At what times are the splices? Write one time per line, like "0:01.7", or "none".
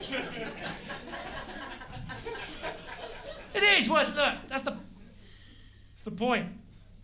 0:03.3